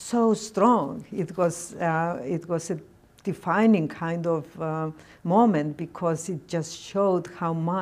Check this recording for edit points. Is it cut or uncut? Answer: uncut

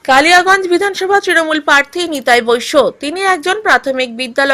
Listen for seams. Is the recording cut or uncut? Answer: uncut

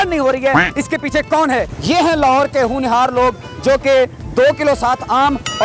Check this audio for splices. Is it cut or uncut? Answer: cut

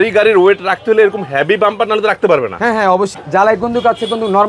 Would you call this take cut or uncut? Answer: cut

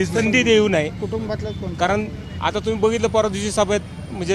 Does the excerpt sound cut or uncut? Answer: uncut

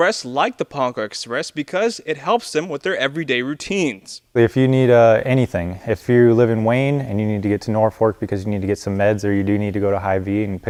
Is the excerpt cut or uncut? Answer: uncut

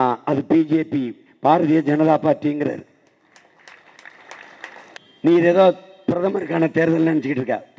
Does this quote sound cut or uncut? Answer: cut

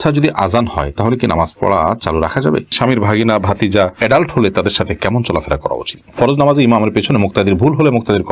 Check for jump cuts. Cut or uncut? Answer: cut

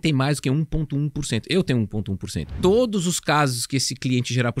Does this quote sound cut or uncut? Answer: cut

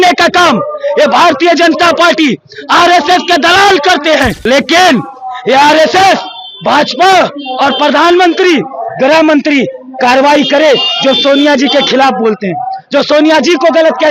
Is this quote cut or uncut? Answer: cut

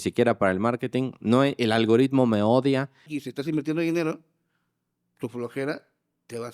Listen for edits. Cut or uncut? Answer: cut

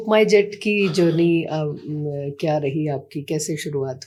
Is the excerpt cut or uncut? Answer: uncut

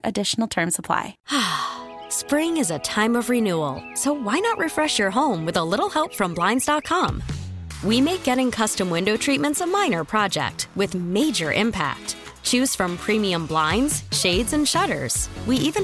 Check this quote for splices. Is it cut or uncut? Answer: cut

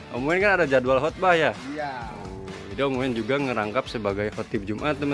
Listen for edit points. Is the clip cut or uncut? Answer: uncut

